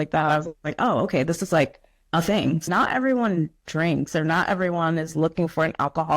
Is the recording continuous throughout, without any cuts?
no; 1 cut; at 2.7 s

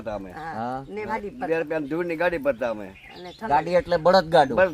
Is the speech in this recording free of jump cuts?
no; 1 cut; at 1.1 s

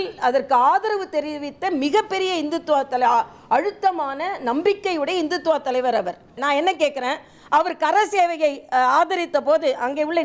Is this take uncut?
no; 1 cut; at 6.4 s

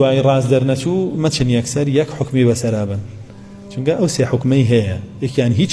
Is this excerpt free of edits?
yes; 0 cuts

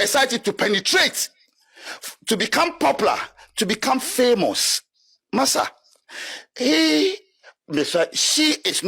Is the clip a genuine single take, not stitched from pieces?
yes; 0 cuts

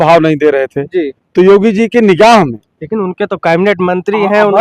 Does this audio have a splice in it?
no; 0 cuts

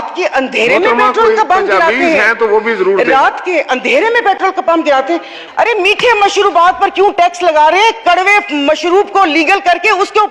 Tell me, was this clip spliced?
yes; 1 cut; at 5.4 s

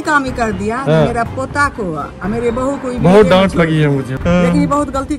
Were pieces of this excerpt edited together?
yes; 1 cut; at 4.1 s

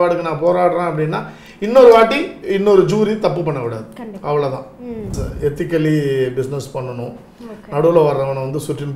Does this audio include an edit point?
yes; 1 cut; at 5.2 s

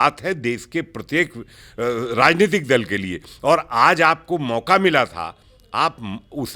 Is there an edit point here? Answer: no; 0 cuts

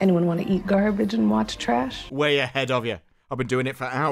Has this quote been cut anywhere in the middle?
yes; 1 cut; at 2.0 s

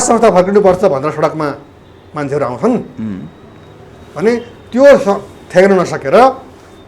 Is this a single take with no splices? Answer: yes; 0 cuts

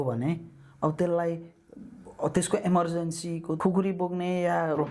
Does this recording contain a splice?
yes; 1 cut; at 3.5 s

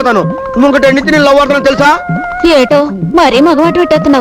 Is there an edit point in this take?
no; 0 cuts

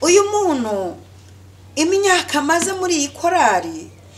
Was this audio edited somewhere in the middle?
no; 0 cuts

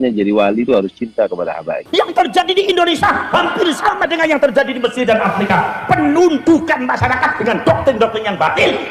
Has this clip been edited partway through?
yes; 1 cut; at 1.7 s

